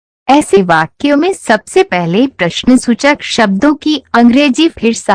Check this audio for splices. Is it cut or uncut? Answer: uncut